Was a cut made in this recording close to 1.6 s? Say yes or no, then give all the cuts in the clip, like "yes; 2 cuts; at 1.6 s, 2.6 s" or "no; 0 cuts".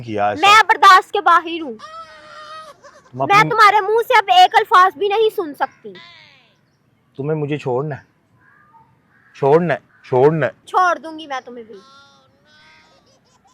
no; 0 cuts